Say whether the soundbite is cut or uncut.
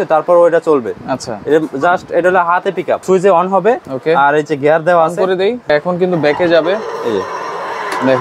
cut